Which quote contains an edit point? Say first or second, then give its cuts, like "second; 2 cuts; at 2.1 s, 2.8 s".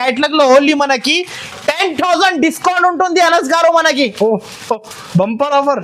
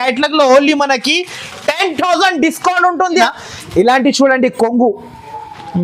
second; 1 cut; at 3.3 s